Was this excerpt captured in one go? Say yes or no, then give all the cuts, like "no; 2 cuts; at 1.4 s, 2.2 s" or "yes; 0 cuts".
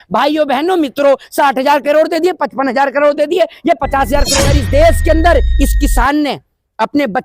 no; 1 cut; at 4.5 s